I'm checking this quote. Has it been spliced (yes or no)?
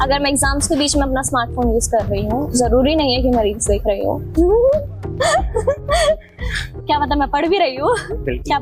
no